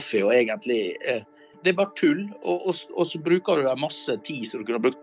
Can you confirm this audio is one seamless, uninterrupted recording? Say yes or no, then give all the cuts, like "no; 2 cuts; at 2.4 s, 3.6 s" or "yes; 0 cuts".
no; 1 cut; at 1.5 s